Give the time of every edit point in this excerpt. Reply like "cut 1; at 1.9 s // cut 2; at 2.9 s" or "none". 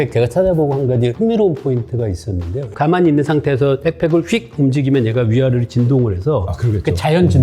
cut 1; at 1.1 s // cut 2; at 2.7 s